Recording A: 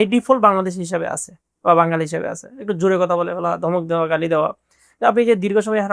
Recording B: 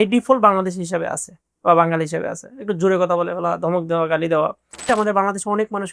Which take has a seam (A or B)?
B